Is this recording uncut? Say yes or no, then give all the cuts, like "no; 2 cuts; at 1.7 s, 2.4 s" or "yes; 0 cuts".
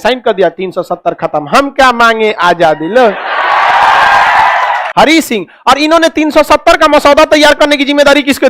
no; 1 cut; at 4.8 s